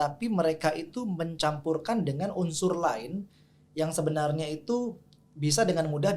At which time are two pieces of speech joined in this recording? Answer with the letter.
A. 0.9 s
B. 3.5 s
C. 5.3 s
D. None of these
D